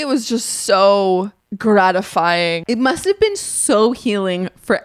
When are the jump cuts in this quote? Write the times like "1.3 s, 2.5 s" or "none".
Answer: 1.4 s, 2.6 s